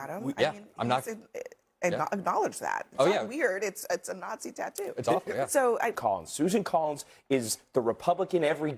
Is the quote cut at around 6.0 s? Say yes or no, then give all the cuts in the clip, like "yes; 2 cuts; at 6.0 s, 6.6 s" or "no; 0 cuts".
yes; 1 cut; at 6.0 s